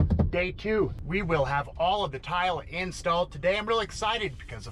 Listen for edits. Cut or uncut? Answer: cut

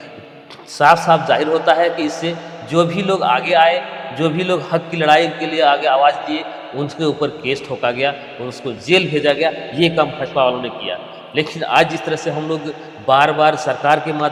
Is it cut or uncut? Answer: uncut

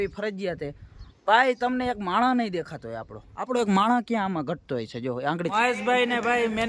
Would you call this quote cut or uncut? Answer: cut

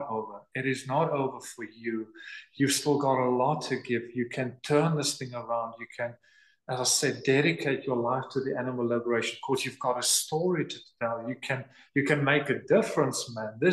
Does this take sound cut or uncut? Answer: uncut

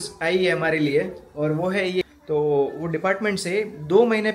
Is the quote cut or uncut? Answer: cut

